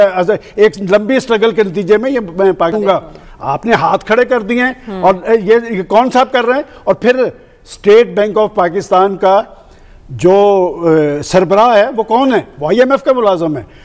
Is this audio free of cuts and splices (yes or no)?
no